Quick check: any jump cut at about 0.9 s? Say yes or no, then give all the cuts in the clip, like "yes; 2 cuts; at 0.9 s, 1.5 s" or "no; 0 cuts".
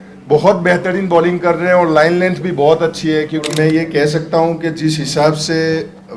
no; 1 cut; at 3.5 s